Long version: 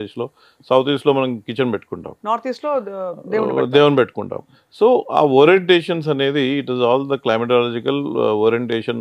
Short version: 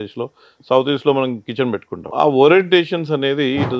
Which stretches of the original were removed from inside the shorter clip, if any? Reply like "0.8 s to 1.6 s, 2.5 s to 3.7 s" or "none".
2.1 s to 5.1 s